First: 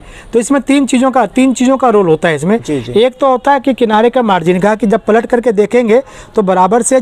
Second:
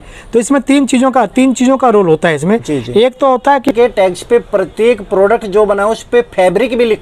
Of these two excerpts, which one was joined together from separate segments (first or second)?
second